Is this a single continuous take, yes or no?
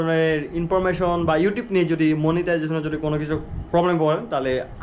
yes